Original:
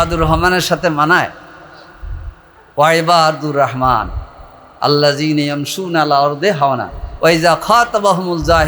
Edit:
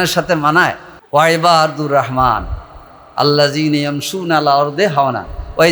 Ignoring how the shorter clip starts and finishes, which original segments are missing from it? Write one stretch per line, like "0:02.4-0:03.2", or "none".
0:01.4-0:02.5